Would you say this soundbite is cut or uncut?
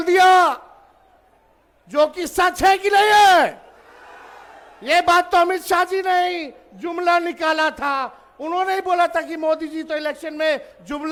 uncut